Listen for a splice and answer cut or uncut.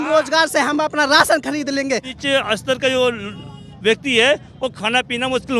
cut